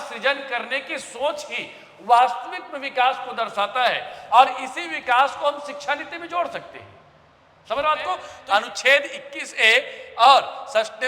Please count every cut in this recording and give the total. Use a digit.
1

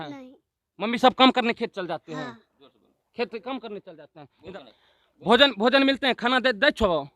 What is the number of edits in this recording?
1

